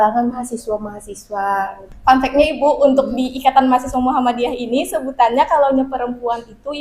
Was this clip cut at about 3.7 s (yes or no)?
no